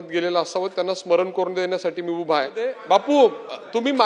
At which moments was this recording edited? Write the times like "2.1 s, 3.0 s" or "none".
3.0 s